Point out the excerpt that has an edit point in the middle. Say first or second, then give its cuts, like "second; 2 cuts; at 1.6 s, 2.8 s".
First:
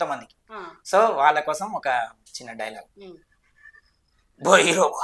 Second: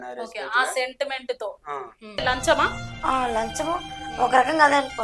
second; 1 cut; at 2.2 s